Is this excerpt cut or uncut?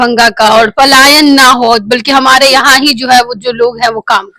uncut